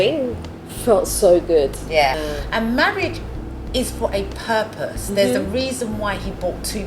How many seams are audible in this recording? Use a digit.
1